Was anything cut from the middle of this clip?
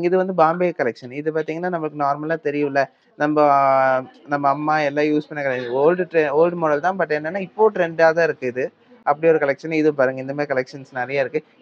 no; 0 cuts

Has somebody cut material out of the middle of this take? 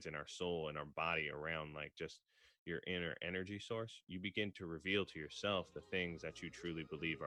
no; 0 cuts

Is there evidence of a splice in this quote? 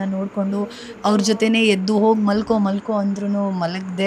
no; 0 cuts

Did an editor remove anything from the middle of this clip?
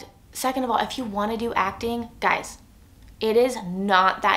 no; 0 cuts

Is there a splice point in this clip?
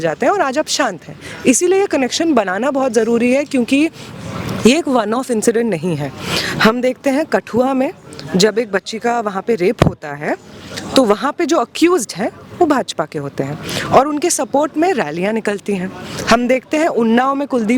no; 0 cuts

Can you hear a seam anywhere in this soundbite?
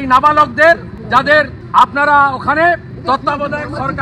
yes; 2 cuts; at 1.3 s, 2.9 s

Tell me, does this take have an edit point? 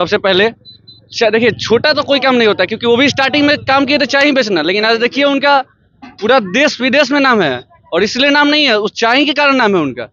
no; 0 cuts

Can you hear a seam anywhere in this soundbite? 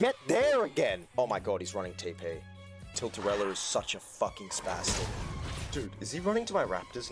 yes; 2 cuts; at 3.0 s, 5.8 s

